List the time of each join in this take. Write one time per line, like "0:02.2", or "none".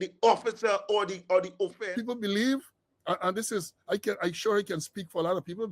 0:01.8